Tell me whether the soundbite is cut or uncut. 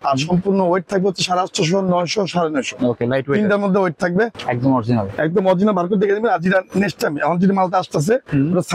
cut